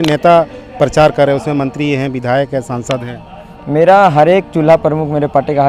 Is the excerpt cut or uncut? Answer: uncut